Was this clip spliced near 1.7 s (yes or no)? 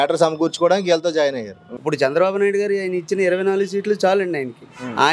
yes